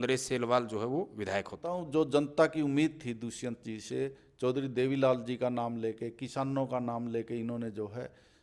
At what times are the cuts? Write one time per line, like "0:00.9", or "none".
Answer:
0:01.7